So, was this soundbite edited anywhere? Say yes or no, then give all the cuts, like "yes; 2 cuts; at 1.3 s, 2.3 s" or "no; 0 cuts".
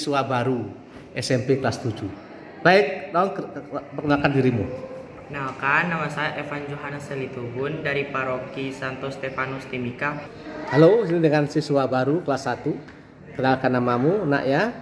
yes; 1 cut; at 10.4 s